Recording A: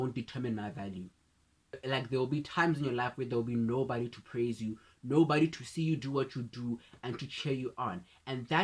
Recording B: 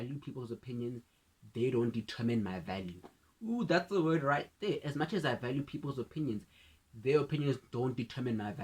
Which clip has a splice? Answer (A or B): A